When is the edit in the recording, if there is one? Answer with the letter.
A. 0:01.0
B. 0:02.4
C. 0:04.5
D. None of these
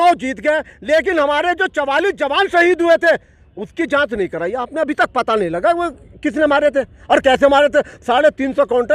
D